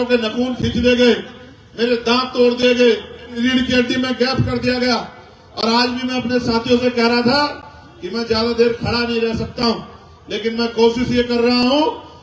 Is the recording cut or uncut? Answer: uncut